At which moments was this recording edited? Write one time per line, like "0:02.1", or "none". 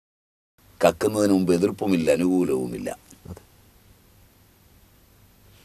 none